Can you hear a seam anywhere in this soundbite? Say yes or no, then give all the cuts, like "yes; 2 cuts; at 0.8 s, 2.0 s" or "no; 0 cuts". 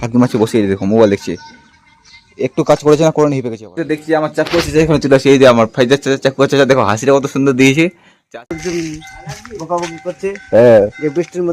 yes; 2 cuts; at 3.7 s, 8.1 s